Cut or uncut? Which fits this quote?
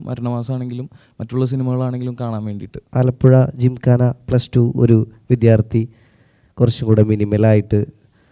cut